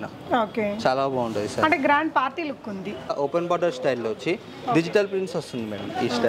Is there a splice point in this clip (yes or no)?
yes